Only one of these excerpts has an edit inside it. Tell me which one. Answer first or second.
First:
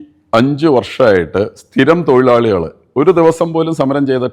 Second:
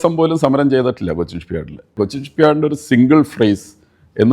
second